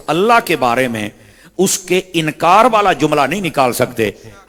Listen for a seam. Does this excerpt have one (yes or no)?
no